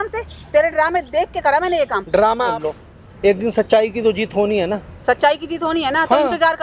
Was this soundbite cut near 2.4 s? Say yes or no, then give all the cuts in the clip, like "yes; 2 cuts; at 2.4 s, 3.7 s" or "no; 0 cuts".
yes; 1 cut; at 2.4 s